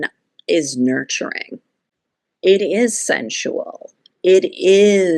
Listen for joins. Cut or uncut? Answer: uncut